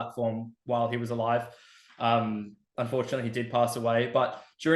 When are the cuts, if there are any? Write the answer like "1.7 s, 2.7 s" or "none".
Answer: none